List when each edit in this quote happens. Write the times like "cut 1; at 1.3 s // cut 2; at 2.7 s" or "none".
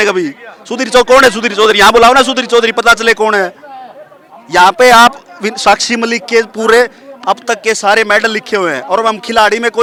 none